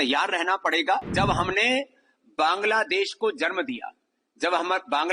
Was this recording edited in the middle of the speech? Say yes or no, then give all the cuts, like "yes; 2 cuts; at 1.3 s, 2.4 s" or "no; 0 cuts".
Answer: yes; 1 cut; at 1.1 s